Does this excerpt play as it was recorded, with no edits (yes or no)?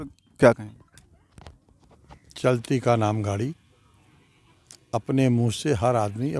yes